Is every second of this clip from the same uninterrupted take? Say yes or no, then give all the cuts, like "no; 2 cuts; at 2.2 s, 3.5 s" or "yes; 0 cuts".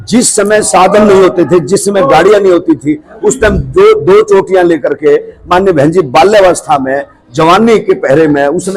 yes; 0 cuts